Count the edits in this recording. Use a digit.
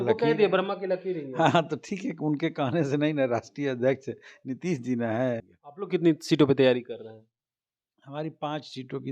1